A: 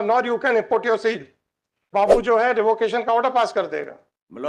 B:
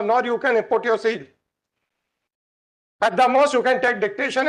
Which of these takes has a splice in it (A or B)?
A